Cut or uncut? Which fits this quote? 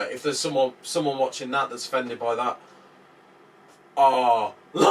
uncut